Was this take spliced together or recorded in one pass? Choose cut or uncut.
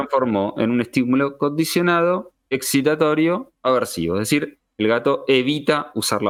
uncut